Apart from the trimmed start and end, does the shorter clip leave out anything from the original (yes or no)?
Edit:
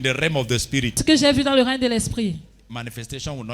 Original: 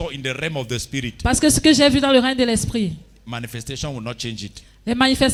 yes